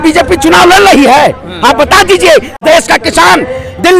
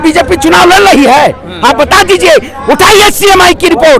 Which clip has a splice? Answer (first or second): first